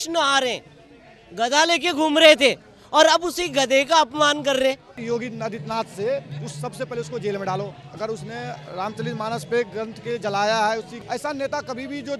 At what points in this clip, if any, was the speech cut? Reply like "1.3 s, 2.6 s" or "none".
4.9 s, 10.9 s